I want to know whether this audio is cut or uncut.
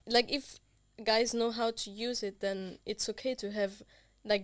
uncut